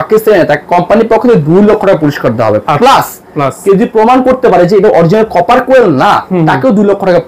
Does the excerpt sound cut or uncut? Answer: uncut